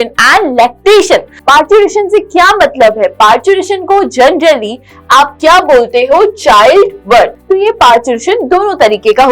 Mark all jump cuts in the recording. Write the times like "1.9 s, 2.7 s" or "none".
1.3 s, 7.4 s